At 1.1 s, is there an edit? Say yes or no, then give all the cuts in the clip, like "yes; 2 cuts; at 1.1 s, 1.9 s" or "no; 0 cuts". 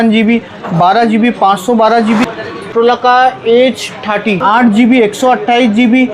no; 2 cuts; at 2.5 s, 4.4 s